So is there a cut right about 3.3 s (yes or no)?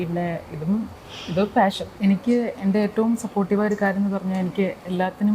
no